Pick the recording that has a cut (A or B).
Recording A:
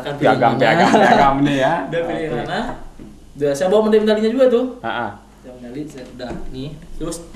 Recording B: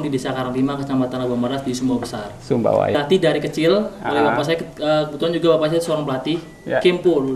B